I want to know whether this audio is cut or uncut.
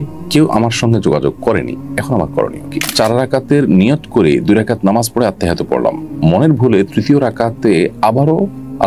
cut